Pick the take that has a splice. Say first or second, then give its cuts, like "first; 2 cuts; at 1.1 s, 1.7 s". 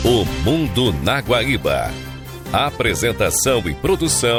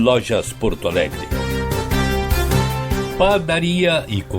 second; 2 cuts; at 1.2 s, 3.1 s